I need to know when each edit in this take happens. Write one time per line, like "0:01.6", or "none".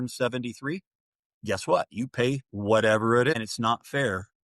0:03.3